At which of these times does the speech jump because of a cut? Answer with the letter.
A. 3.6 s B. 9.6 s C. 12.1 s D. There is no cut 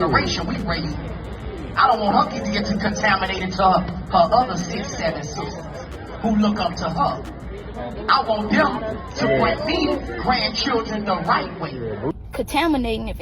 C